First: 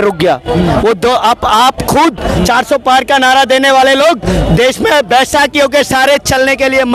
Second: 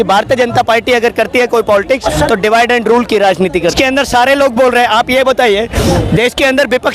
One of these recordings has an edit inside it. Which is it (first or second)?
second